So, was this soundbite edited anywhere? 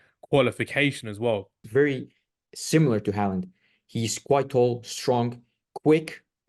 yes; 1 cut; at 1.6 s

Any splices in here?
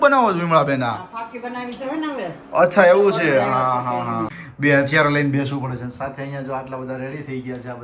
yes; 1 cut; at 4.4 s

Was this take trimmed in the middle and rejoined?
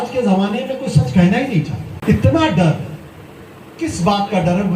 yes; 1 cut; at 1.9 s

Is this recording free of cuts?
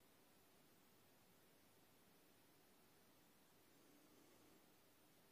yes; 0 cuts

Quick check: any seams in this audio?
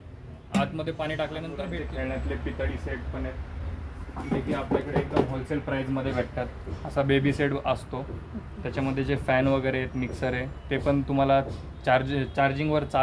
yes; 1 cut; at 1.6 s

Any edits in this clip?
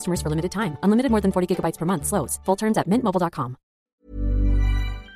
yes; 1 cut; at 3.8 s

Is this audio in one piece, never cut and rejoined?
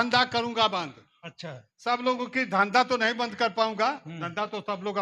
yes; 0 cuts

